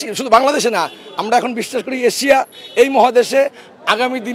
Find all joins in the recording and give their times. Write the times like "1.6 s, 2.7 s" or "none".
none